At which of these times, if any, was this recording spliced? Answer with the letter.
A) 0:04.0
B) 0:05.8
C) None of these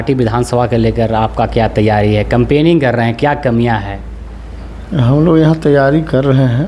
C